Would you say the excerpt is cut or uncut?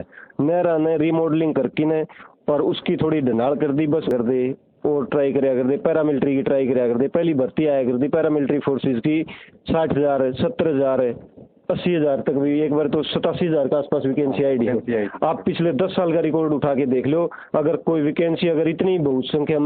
cut